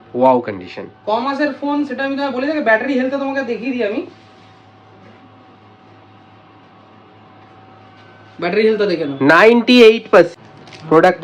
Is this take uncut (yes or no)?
no